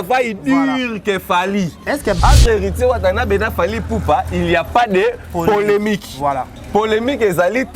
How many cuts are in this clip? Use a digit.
1